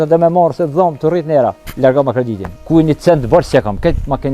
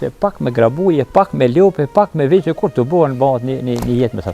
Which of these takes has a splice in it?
first; 2 cuts; at 1.7 s, 2.5 s

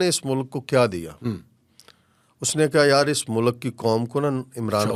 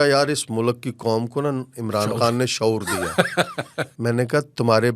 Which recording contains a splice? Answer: second; 1 cut; at 3.8 s

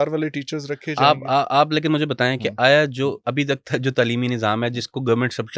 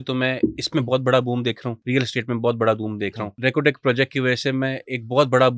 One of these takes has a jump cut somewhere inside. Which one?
second; 2 cuts; at 1.7 s, 3.3 s

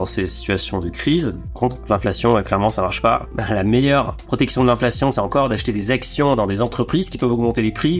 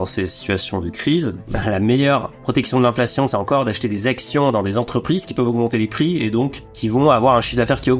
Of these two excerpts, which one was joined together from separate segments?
second; 1 cut; at 1.5 s

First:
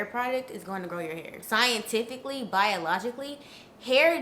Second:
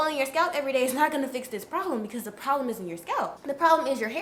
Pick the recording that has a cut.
first; 1 cut; at 1.3 s

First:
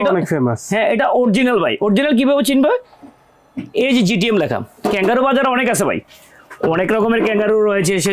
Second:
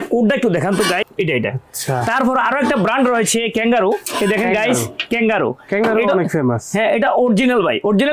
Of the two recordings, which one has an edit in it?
second; 1 cut; at 1.0 s

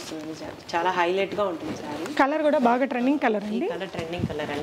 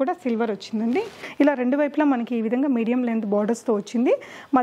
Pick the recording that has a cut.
second; 1 cut; at 1.2 s

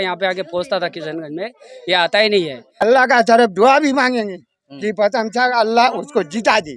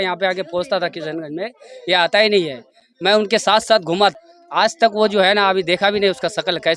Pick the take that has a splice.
first; 1 cut; at 2.8 s

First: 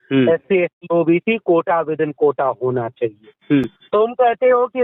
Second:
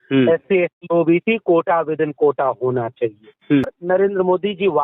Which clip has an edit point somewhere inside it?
second; 1 cut; at 3.8 s

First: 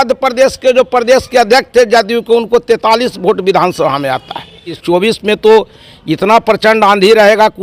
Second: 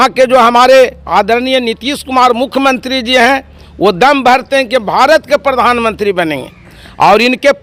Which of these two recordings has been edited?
first; 1 cut; at 4.7 s

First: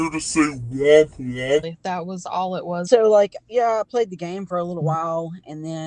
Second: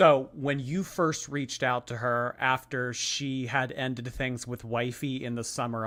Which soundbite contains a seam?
first; 1 cut; at 2.8 s

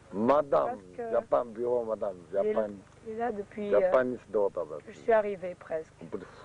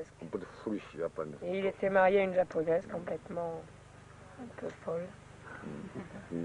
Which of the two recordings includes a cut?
second; 1 cut; at 2.9 s

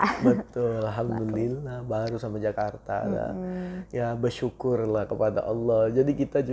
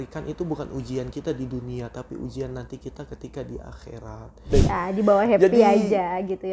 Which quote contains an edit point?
second; 1 cut; at 4.5 s

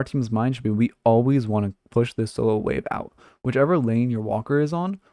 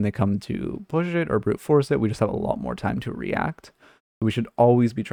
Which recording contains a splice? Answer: first; 1 cut; at 1.8 s

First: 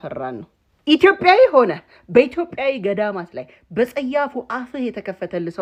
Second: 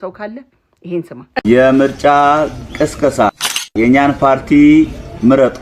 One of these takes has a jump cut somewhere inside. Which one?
second; 1 cut; at 1.2 s

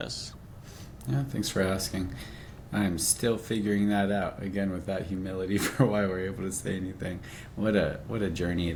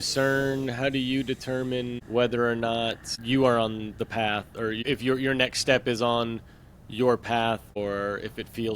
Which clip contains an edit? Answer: second; 4 cuts; at 2.0 s, 3.1 s, 4.8 s, 7.8 s

